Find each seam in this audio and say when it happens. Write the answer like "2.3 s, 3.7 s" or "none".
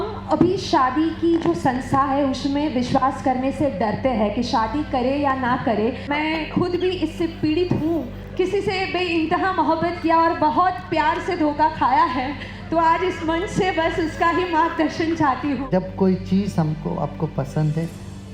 6.0 s, 8.2 s, 15.6 s